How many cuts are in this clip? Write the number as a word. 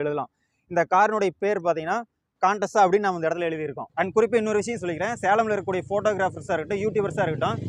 one